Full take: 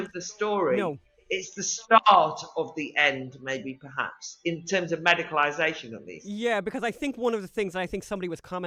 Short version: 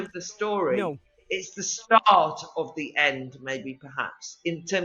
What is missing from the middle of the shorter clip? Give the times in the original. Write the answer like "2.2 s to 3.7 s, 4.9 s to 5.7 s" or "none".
none